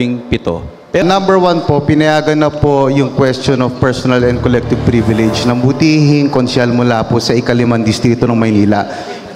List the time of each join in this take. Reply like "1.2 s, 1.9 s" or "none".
1.0 s